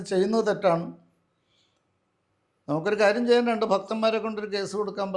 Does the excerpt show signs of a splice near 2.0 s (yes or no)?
no